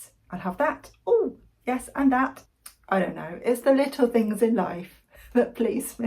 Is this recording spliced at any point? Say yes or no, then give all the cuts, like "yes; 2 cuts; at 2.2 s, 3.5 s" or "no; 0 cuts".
yes; 1 cut; at 2.4 s